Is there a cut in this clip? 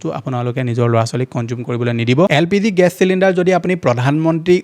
yes; 1 cut; at 2.3 s

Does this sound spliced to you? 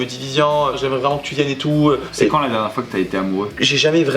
yes; 1 cut; at 2.0 s

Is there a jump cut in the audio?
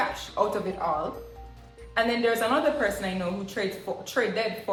no; 0 cuts

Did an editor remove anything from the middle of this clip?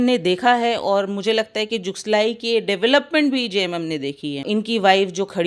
yes; 1 cut; at 4.4 s

